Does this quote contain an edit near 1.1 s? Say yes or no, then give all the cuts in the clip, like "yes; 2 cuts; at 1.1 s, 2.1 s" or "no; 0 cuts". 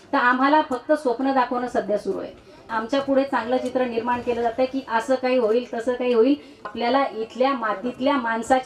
no; 2 cuts; at 2.7 s, 6.6 s